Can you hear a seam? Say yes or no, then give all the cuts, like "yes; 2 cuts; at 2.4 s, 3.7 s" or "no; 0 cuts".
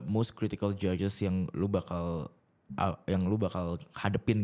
no; 0 cuts